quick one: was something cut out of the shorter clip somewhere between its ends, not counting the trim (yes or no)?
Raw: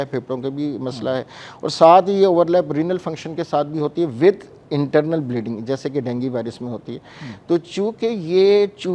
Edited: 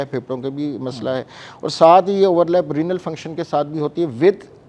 no